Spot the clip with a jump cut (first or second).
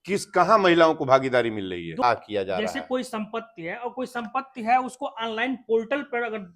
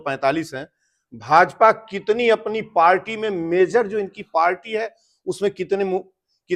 first